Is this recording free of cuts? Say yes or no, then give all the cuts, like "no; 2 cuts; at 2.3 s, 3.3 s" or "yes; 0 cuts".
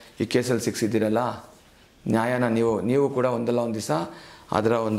yes; 0 cuts